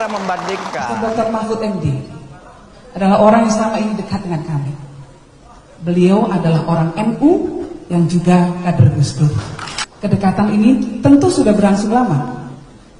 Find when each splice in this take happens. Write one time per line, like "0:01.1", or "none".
0:00.9